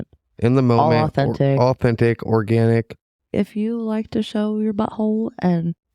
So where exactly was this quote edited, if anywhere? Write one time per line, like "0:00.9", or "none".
0:03.3